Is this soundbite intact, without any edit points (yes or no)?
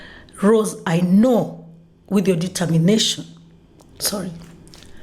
yes